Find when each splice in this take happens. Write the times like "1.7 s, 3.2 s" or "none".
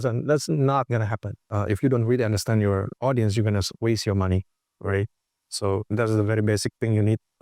1.5 s